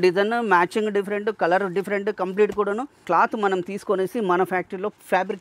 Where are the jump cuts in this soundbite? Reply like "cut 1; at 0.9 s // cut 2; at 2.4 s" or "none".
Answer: cut 1; at 3.1 s